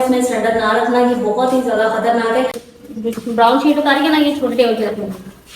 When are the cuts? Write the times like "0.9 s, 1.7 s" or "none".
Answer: 2.7 s